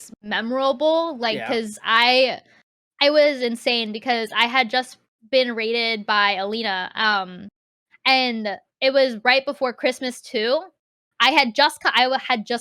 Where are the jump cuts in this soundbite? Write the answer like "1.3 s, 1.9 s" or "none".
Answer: 10.7 s